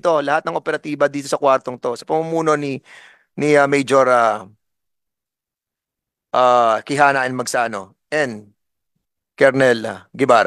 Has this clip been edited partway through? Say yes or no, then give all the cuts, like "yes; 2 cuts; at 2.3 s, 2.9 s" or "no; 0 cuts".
no; 0 cuts